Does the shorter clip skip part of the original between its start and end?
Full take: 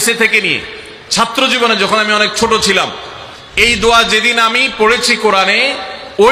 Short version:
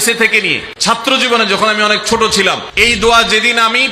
yes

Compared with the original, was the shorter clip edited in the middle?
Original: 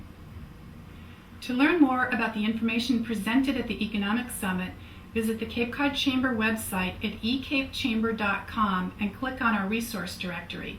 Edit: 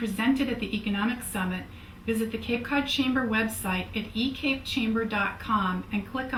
no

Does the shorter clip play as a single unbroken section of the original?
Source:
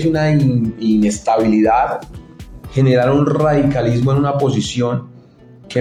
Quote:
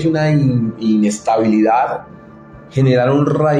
yes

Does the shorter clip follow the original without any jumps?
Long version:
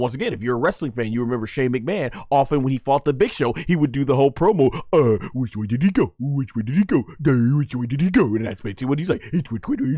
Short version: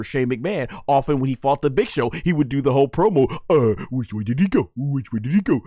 yes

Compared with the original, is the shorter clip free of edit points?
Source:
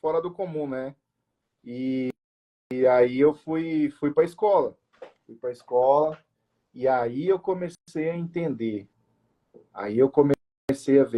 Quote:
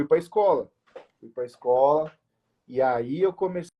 yes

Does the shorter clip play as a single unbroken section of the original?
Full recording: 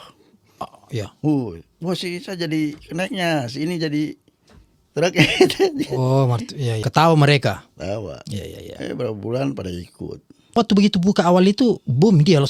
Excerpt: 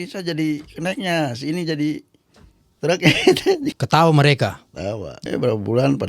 no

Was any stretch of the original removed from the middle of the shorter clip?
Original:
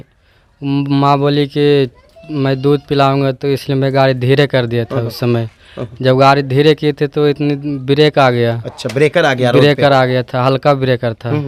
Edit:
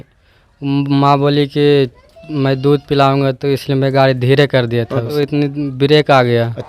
yes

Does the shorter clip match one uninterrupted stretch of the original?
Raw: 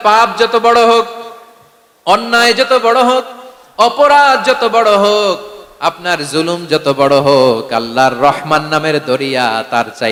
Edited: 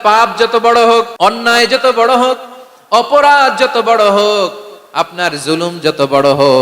no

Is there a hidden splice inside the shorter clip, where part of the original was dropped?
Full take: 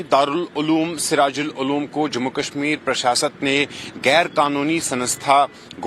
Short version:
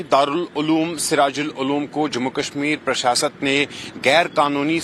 no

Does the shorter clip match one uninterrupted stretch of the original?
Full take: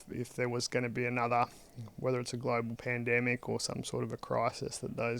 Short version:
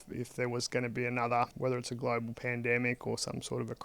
no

